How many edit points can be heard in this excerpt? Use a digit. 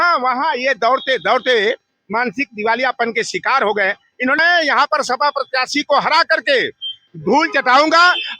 1